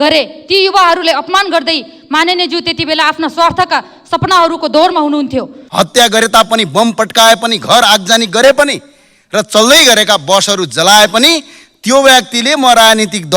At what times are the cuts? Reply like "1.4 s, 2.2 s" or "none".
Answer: 5.6 s

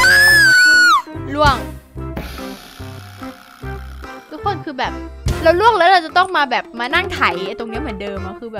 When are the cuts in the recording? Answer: none

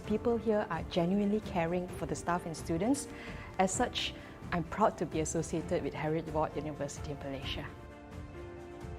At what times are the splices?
8.0 s

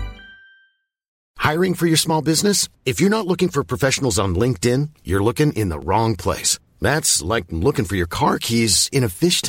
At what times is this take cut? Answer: 1.2 s

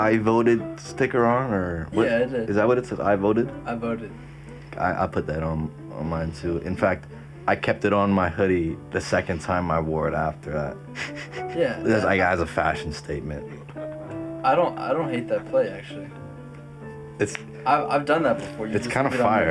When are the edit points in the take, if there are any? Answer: none

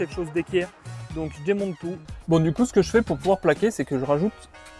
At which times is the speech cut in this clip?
2.0 s

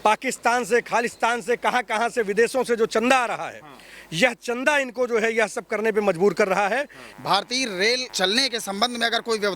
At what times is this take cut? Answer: 7.0 s, 8.1 s

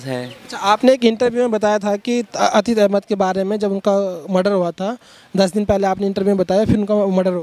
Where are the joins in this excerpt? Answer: none

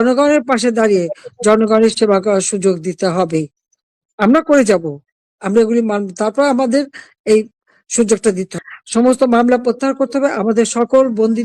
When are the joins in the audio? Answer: 8.5 s

